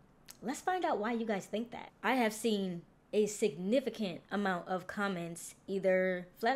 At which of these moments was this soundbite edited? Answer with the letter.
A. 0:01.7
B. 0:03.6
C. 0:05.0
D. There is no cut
A